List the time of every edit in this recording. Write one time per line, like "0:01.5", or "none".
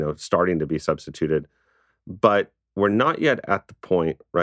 none